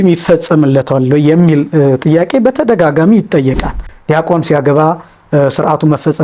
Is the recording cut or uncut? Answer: cut